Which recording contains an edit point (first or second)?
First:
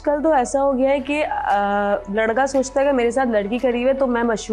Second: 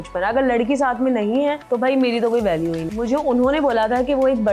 second